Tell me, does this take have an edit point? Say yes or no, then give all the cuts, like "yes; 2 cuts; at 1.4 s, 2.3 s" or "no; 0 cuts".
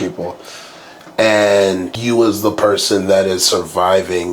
yes; 1 cut; at 1.9 s